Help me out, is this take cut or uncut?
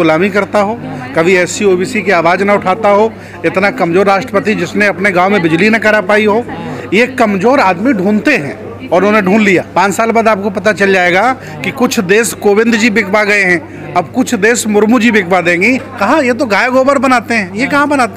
cut